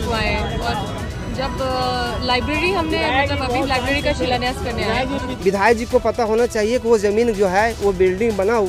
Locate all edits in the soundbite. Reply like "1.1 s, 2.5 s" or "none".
5.3 s